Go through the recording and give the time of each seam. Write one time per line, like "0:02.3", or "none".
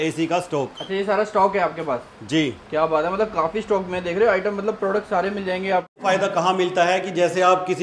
0:06.0